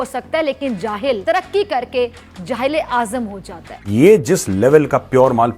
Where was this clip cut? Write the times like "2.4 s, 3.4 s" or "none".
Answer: 3.7 s